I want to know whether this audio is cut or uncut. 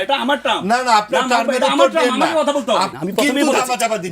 cut